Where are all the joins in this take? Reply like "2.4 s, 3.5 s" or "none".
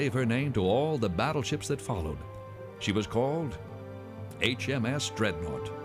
2.0 s